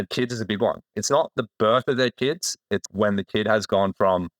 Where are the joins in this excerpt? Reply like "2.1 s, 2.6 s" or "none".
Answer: 1.0 s, 2.8 s